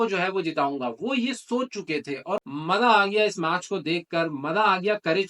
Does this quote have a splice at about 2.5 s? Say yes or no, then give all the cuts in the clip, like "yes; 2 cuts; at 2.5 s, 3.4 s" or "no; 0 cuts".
yes; 1 cut; at 2.5 s